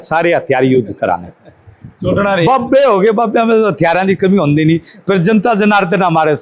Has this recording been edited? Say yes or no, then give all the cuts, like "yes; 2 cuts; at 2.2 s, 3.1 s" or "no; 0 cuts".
no; 0 cuts